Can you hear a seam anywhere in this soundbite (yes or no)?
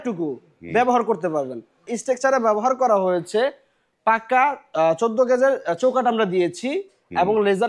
yes